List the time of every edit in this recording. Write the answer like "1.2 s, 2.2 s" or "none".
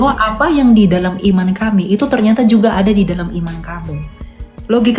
none